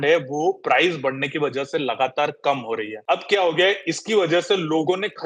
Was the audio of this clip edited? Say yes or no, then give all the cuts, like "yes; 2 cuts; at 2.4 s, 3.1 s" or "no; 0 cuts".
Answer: yes; 1 cut; at 2.9 s